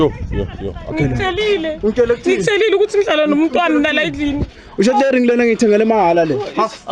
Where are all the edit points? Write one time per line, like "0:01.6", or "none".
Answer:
0:00.9